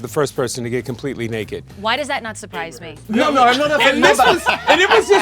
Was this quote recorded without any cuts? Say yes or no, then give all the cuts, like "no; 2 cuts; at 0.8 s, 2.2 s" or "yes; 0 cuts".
no; 1 cut; at 2.9 s